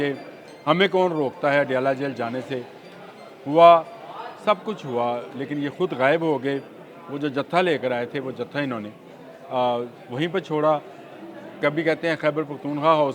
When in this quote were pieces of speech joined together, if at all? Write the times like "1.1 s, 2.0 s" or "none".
none

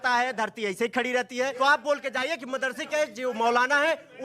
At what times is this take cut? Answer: 1.5 s

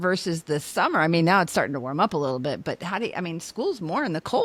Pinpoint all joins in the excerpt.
none

